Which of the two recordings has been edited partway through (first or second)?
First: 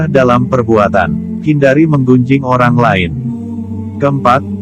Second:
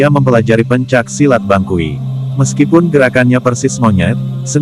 first